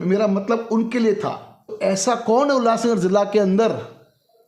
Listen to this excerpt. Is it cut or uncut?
cut